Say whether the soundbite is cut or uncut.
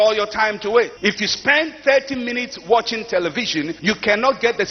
cut